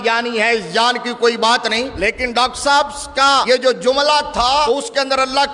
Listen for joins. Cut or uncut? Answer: cut